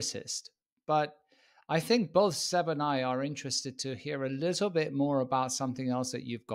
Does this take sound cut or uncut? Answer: uncut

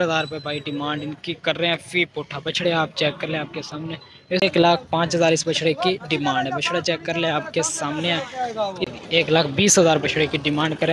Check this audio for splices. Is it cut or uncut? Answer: cut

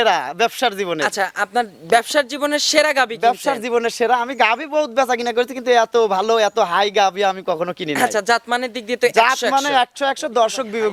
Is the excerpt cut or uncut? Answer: uncut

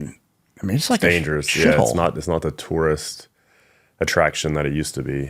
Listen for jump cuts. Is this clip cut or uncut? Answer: uncut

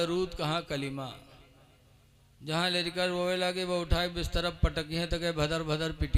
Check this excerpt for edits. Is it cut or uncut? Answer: uncut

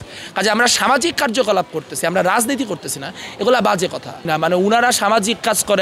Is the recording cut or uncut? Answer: cut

